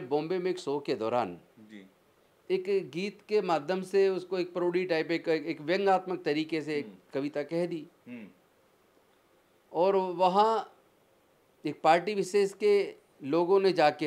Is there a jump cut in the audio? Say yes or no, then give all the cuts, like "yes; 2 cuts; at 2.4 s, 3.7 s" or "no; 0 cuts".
no; 0 cuts